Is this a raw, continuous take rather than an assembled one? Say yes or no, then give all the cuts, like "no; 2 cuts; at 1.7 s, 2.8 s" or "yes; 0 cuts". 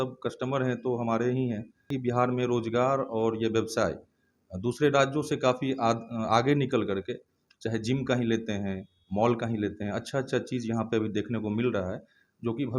no; 1 cut; at 1.9 s